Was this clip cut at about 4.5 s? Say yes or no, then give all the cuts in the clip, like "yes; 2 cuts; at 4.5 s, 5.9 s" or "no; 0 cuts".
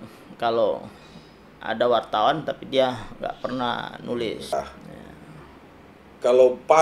yes; 1 cut; at 4.5 s